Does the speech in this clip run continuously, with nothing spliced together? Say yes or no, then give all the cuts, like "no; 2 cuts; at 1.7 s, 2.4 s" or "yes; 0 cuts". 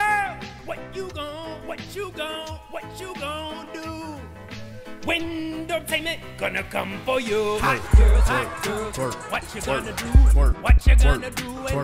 yes; 0 cuts